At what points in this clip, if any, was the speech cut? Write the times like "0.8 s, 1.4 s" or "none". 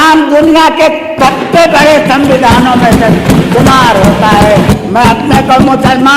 4.7 s